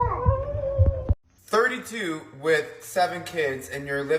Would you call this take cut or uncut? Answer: cut